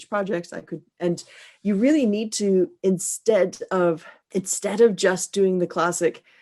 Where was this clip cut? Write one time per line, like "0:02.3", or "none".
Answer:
0:04.1